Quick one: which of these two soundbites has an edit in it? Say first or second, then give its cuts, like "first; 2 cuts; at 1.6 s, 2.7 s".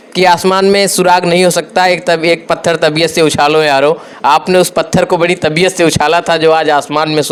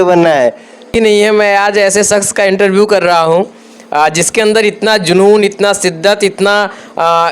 second; 1 cut; at 0.9 s